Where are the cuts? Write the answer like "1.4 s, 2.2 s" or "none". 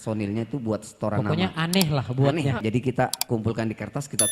2.6 s

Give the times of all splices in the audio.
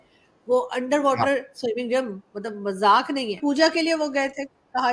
3.4 s

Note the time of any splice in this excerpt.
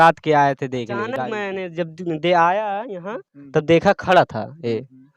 1.4 s

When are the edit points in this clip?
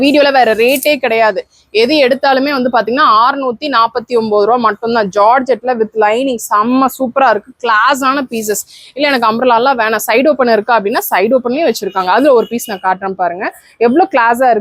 none

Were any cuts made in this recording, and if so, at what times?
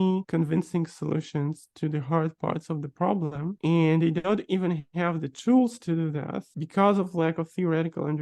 none

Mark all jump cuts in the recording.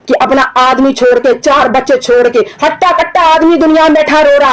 none

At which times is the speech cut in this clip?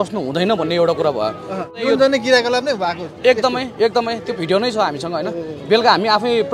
1.7 s

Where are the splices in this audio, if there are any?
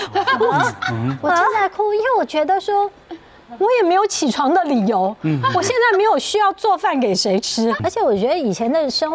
7.8 s

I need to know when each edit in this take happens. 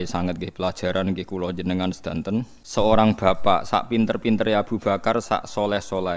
2.6 s

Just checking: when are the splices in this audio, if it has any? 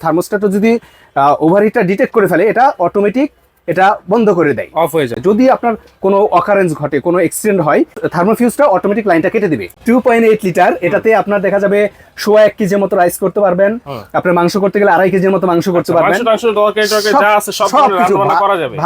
5.1 s, 8.0 s, 9.7 s

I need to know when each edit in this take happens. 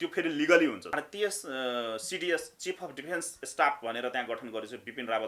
0.9 s

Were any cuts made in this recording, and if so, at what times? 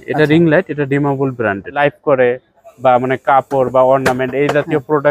1.8 s

